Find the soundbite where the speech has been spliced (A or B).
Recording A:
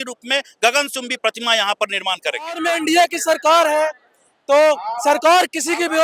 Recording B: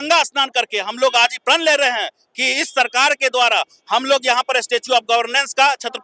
A